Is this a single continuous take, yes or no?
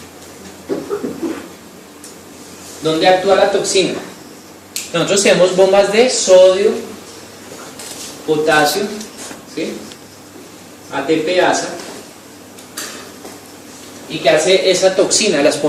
yes